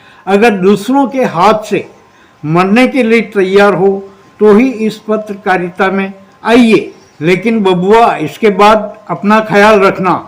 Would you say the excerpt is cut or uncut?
uncut